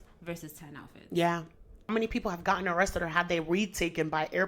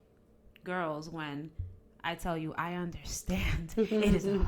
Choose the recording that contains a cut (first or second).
first